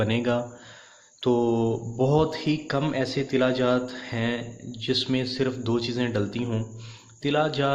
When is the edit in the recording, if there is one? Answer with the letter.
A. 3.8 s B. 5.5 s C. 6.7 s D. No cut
B